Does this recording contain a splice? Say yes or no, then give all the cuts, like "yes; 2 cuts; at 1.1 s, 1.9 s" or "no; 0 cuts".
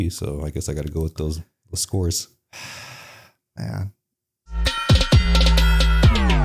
yes; 1 cut; at 4.6 s